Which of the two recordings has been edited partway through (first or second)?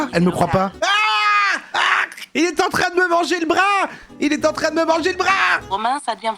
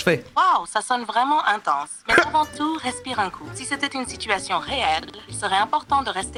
first